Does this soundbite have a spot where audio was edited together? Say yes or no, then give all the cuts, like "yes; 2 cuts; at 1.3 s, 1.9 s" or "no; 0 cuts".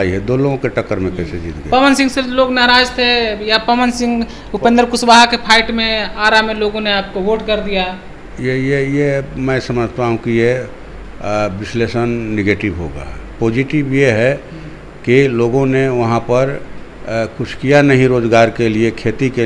no; 0 cuts